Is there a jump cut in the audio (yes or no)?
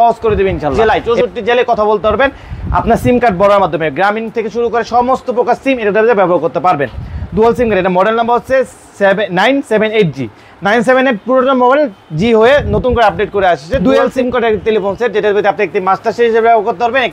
yes